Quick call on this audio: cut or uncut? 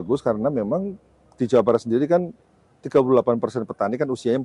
uncut